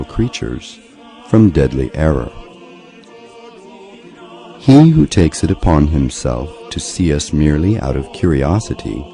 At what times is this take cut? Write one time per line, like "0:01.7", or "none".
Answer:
0:07.4